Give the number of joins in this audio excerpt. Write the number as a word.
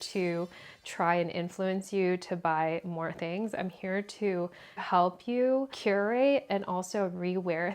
two